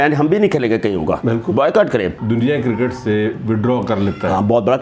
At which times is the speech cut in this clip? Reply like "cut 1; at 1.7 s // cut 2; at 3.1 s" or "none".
cut 1; at 2.2 s